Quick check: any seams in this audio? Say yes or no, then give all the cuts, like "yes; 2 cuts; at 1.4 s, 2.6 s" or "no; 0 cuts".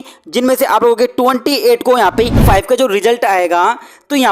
yes; 1 cut; at 2.4 s